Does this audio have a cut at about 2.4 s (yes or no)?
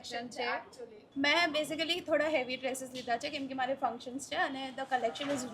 no